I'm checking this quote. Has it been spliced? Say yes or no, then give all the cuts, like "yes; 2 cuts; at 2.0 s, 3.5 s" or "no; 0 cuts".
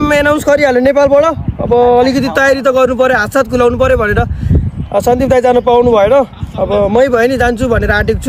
no; 0 cuts